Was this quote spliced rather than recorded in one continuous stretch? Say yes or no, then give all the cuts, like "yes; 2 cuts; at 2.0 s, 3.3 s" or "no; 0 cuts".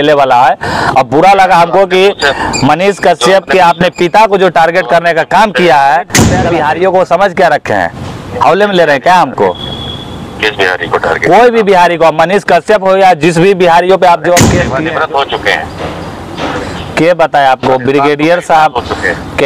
yes; 2 cuts; at 6.4 s, 14.6 s